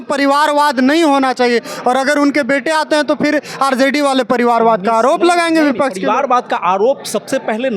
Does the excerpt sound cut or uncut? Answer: uncut